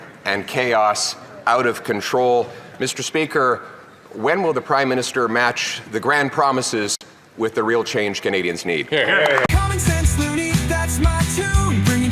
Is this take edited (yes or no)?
yes